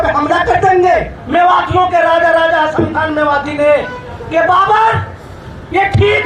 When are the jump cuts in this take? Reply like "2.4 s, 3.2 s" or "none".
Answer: 1.2 s